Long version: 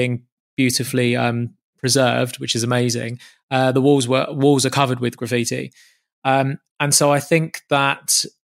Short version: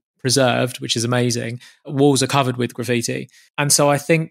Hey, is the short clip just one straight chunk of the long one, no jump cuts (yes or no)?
no